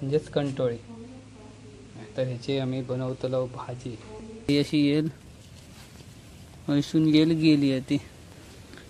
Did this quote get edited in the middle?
yes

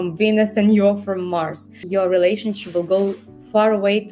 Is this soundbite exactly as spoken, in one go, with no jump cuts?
no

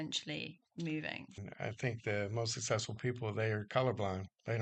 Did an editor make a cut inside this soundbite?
yes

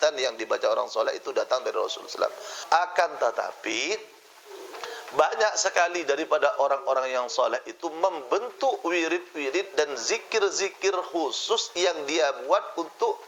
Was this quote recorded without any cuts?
no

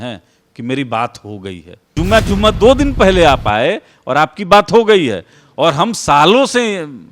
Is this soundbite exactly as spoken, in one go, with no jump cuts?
no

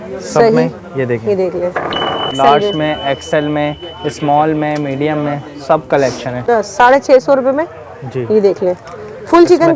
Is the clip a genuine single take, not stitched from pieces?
no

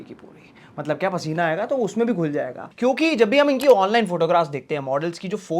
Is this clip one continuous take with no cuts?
no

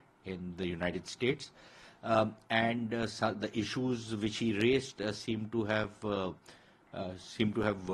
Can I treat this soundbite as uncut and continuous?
yes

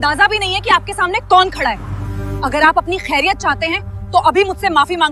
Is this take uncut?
yes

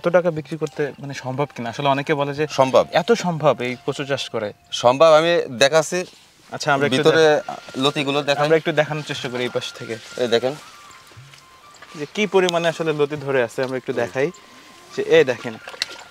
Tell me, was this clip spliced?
no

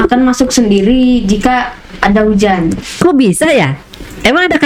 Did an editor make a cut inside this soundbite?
no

